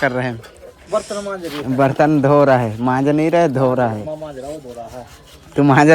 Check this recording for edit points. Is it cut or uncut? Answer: uncut